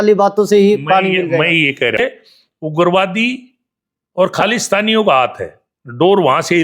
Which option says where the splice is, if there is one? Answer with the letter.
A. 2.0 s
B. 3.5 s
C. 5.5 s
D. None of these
A